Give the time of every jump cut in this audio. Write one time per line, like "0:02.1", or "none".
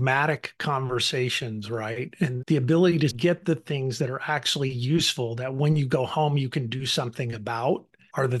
0:02.4